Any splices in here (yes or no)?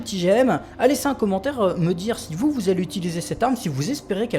no